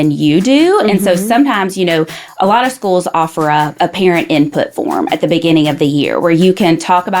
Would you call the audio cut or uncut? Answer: cut